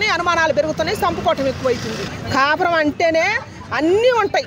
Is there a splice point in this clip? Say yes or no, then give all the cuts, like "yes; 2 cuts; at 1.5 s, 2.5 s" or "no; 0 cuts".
yes; 1 cut; at 2.1 s